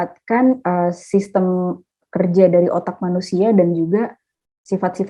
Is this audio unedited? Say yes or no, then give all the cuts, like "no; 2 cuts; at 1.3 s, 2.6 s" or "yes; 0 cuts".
yes; 0 cuts